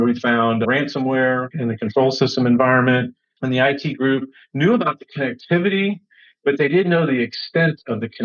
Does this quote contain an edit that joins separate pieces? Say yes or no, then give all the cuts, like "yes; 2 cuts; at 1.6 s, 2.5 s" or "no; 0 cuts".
yes; 1 cut; at 3.4 s